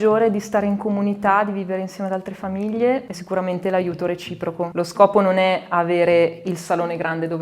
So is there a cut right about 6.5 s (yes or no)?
no